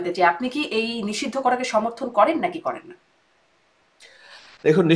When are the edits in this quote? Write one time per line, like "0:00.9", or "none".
none